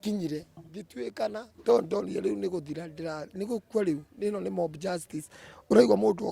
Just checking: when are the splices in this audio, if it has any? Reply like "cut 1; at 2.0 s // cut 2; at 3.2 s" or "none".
cut 1; at 1.0 s